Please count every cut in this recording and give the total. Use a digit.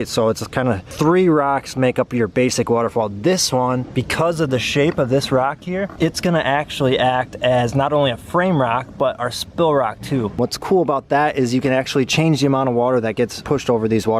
1